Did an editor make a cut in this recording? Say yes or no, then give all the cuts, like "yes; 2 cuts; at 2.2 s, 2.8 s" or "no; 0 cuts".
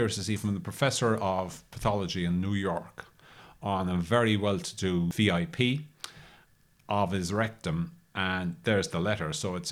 yes; 1 cut; at 5.1 s